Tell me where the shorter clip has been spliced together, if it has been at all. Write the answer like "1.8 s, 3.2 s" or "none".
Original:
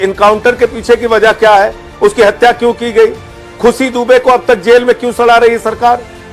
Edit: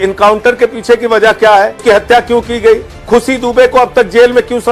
1.8 s, 2.9 s